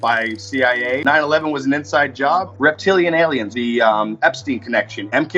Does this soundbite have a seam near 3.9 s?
no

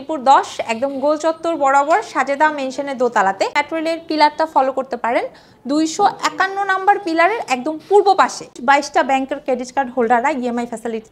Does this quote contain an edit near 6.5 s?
no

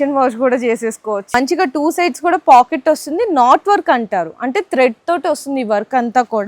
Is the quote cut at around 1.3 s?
yes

